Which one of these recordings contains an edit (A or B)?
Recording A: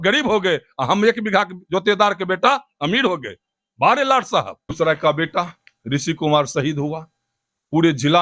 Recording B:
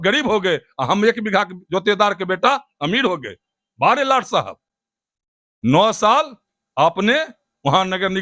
A